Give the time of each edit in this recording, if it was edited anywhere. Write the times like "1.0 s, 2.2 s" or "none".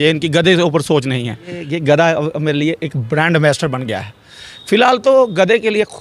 1.7 s